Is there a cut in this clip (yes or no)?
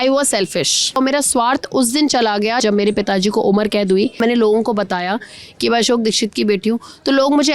yes